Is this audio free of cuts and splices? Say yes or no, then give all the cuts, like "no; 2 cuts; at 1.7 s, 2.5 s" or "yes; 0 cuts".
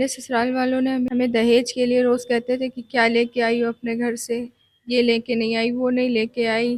no; 1 cut; at 1.1 s